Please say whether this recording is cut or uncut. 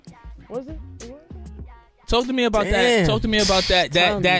uncut